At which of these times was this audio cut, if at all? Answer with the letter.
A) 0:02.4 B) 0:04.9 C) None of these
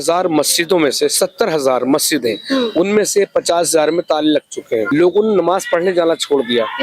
B